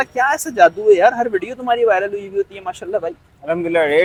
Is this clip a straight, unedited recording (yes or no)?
yes